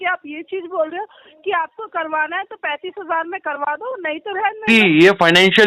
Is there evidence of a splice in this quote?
yes; 1 cut; at 4.6 s

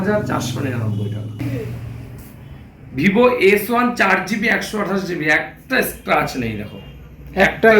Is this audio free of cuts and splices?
no; 1 cut; at 1.4 s

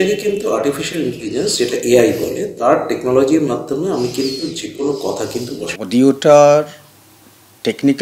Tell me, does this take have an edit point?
yes; 1 cut; at 5.7 s

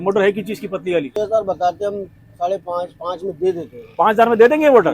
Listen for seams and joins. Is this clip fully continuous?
no; 1 cut; at 1.1 s

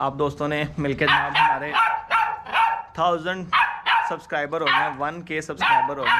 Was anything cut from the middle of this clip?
no; 0 cuts

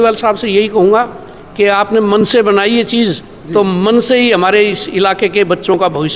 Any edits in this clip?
no; 0 cuts

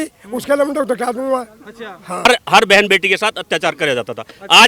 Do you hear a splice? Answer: yes; 1 cut; at 2.3 s

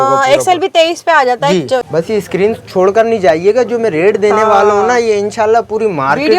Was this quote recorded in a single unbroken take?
no; 1 cut; at 1.8 s

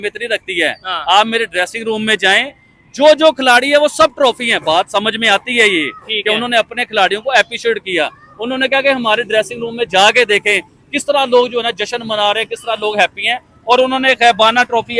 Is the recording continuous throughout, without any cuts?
yes; 0 cuts

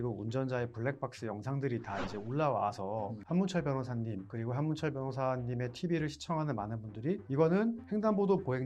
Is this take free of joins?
no; 4 cuts; at 3.2 s, 4.3 s, 7.2 s, 7.8 s

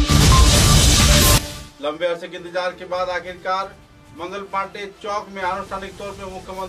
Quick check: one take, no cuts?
no; 1 cut; at 1.6 s

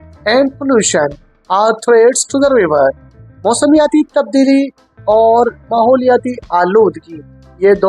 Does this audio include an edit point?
no; 0 cuts

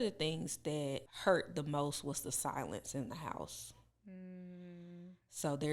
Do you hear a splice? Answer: yes; 1 cut; at 1.1 s

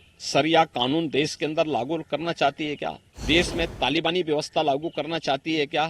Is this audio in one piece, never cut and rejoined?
no; 1 cut; at 3.1 s

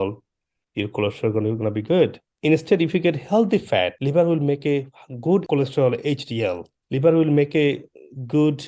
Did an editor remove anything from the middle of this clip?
yes; 4 cuts; at 2.3 s, 4.0 s, 5.5 s, 6.7 s

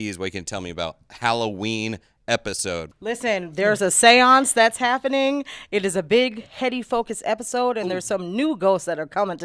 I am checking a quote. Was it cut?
yes; 1 cut; at 2.8 s

